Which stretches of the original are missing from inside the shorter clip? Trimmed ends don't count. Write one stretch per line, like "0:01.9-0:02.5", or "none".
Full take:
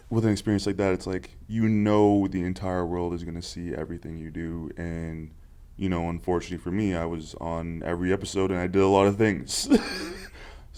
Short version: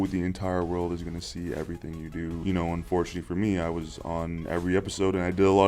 0:04.6-0:05.8